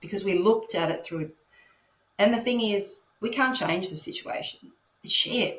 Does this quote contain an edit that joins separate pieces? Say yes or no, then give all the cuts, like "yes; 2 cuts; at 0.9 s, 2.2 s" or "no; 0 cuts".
no; 0 cuts